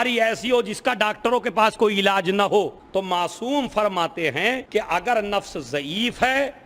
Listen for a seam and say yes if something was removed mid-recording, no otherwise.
yes